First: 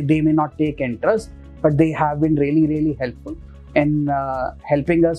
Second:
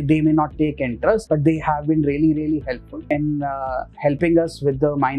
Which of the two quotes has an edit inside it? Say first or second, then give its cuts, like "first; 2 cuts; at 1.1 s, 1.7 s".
second; 2 cuts; at 1.2 s, 2.9 s